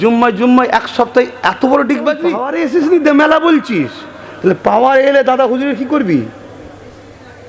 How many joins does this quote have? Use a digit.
1